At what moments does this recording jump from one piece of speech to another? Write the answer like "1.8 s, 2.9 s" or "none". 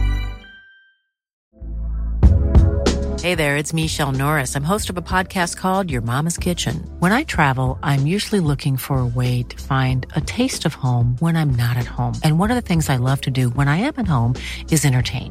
1.4 s